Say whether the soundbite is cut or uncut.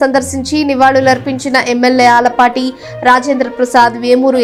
uncut